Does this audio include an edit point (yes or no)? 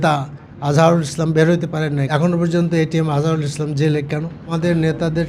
yes